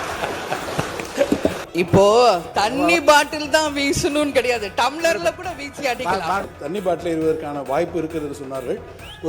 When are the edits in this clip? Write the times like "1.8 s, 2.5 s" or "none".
1.6 s, 6.5 s